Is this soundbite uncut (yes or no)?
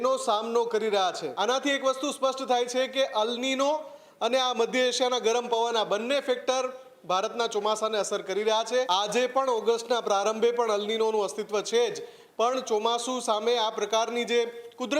no